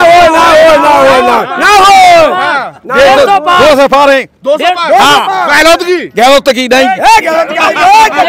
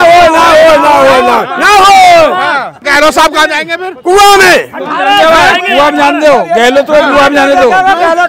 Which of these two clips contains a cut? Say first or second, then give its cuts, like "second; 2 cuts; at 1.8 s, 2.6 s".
second; 1 cut; at 2.8 s